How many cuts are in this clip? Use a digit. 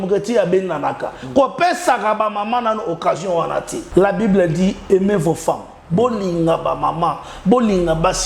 1